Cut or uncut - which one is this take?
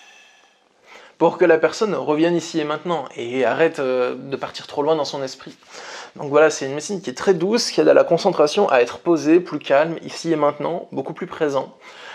uncut